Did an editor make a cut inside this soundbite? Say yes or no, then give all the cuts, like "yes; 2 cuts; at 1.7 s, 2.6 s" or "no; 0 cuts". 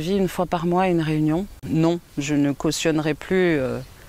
yes; 1 cut; at 1.6 s